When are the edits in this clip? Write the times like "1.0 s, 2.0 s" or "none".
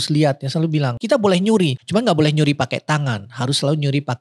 1.0 s, 1.8 s